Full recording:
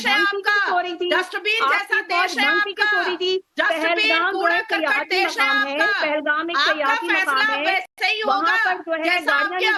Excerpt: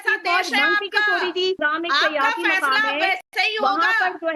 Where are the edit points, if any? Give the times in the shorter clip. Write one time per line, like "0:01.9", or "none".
0:01.6